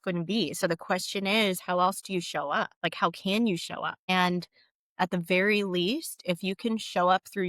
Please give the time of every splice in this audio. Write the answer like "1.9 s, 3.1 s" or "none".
2.7 s, 4.0 s